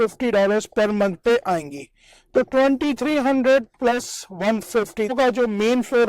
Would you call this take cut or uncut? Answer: cut